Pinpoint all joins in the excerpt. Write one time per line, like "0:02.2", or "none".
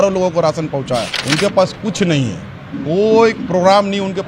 0:01.2